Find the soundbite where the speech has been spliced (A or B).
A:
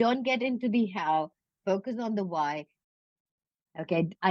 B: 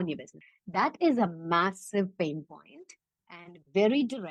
A